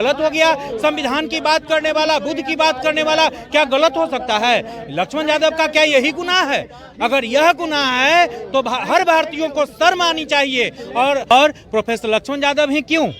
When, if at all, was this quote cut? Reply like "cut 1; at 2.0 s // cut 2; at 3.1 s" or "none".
cut 1; at 11.3 s

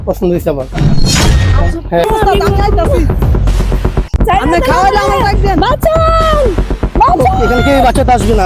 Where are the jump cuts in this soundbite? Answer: cut 1; at 2.0 s

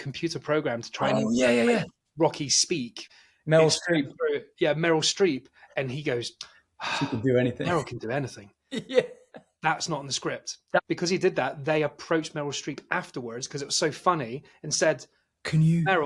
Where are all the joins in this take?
cut 1; at 3.0 s // cut 2; at 10.8 s

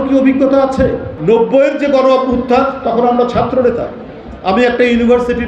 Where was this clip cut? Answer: cut 1; at 1.1 s

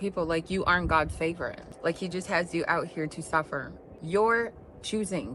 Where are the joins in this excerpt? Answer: cut 1; at 1.6 s

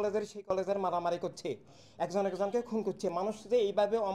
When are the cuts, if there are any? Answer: none

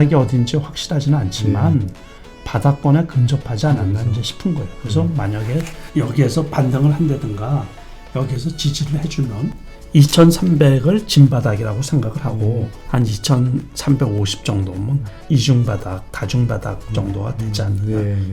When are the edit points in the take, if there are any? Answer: cut 1; at 5.8 s // cut 2; at 12.8 s // cut 3; at 15.1 s

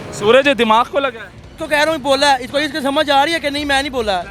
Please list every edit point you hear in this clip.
cut 1; at 1.6 s

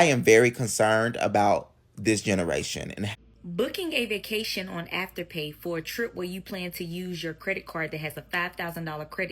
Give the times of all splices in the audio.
cut 1; at 3.0 s

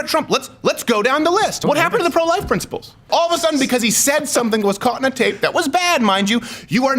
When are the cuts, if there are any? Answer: cut 1; at 1.6 s // cut 2; at 3.1 s

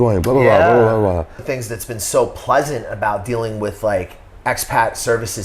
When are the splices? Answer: cut 1; at 1.5 s

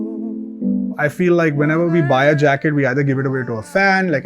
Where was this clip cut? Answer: cut 1; at 0.9 s

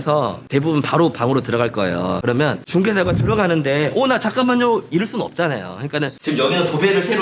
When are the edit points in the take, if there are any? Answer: cut 1; at 2.2 s // cut 2; at 6.1 s

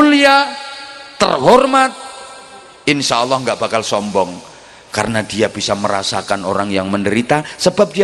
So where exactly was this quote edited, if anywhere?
none

